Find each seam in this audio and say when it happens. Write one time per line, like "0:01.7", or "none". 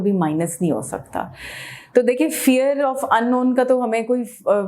none

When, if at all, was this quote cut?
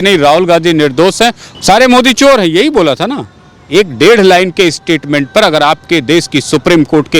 0:01.5

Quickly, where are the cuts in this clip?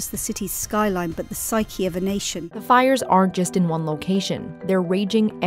0:02.4

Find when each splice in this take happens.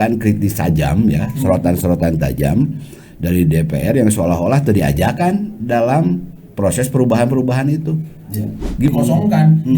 0:08.9

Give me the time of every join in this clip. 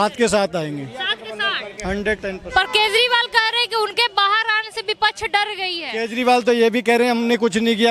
none

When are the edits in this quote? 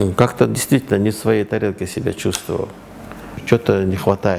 0:03.3

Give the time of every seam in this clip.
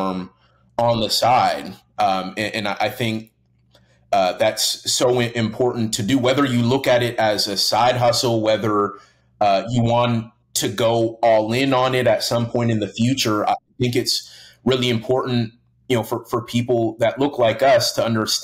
none

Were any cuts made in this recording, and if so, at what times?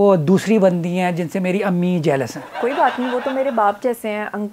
0:02.6

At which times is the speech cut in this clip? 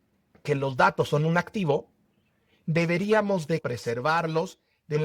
0:03.6

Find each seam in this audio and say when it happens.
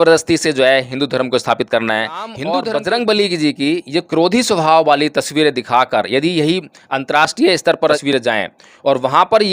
0:02.4
0:08.0

